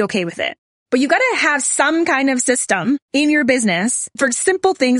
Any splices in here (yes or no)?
yes